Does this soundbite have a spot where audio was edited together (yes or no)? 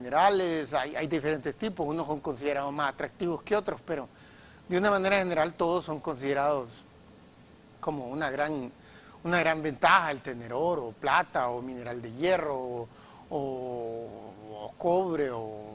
yes